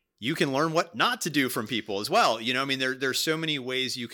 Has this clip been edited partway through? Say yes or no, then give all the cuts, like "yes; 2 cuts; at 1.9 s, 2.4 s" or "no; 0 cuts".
no; 0 cuts